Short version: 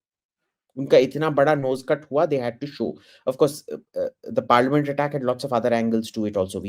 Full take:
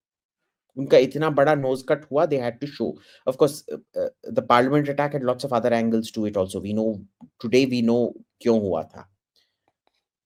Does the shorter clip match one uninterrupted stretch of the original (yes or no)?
yes